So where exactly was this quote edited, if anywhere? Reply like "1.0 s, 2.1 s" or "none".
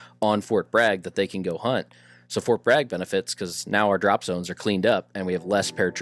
none